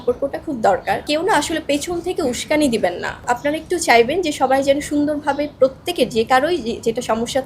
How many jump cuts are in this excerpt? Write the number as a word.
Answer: two